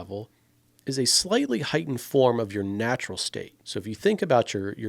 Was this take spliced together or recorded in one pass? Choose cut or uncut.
cut